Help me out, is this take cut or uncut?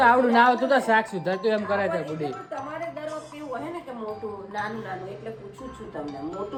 uncut